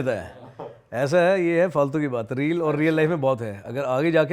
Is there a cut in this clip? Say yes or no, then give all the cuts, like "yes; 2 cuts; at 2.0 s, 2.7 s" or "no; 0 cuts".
no; 0 cuts